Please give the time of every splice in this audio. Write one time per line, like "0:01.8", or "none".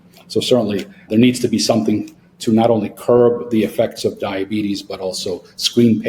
0:01.0